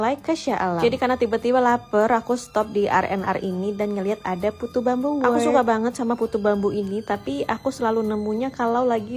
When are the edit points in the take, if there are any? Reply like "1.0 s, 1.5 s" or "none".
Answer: none